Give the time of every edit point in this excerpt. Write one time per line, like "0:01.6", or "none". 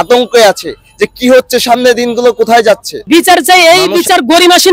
0:02.9